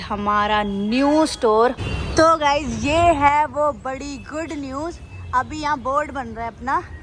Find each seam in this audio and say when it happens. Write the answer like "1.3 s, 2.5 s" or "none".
1.8 s